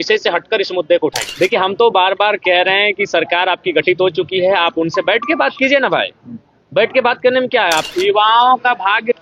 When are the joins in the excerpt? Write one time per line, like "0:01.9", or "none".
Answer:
0:01.2
0:07.9